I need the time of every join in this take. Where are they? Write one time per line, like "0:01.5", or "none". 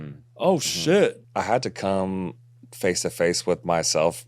0:01.2